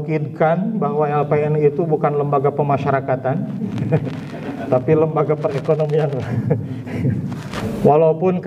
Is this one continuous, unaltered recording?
no; 1 cut; at 7.6 s

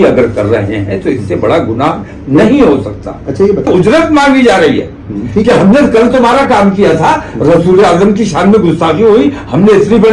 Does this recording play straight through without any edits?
no; 1 cut; at 3.7 s

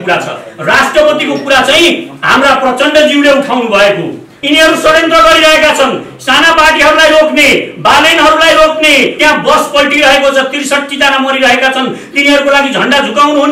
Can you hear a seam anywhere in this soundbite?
yes; 2 cuts; at 4.3 s, 9.1 s

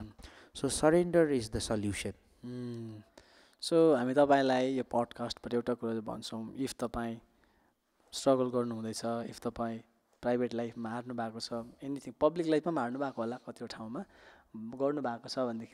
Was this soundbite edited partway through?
no; 0 cuts

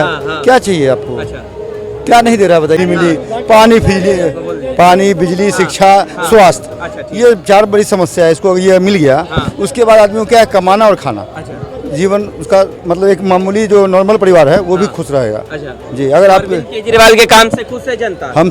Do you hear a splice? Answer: yes; 1 cut; at 2.8 s

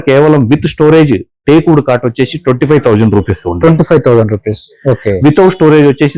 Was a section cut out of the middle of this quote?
no; 0 cuts

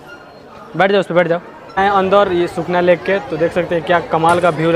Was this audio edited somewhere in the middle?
yes; 1 cut; at 1.6 s

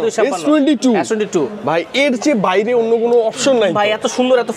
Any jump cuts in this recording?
no; 0 cuts

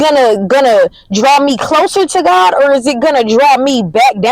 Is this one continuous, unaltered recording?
yes; 0 cuts

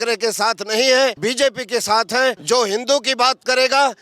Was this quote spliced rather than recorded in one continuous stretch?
yes; 2 cuts; at 1.2 s, 2.4 s

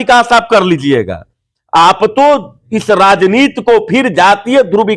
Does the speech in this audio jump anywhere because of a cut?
no; 0 cuts

